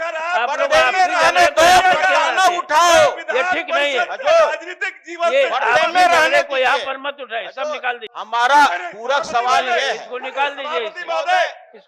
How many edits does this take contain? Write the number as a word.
one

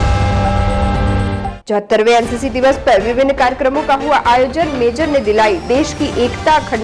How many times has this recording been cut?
zero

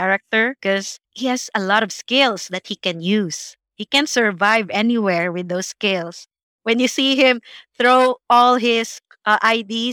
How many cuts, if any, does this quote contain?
zero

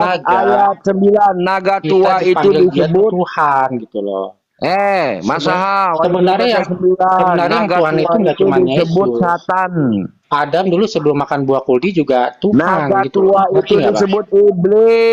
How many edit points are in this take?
zero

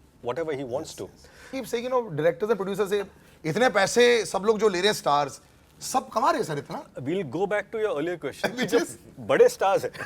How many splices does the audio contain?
one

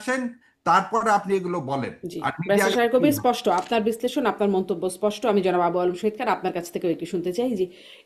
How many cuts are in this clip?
zero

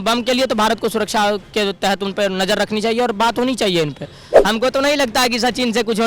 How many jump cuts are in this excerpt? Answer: one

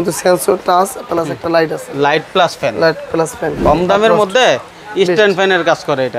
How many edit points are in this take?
one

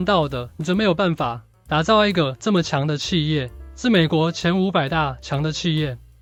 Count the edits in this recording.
zero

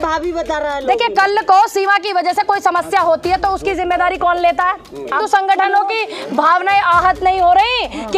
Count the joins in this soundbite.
one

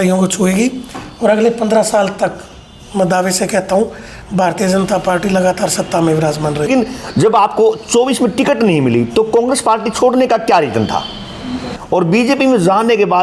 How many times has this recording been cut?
two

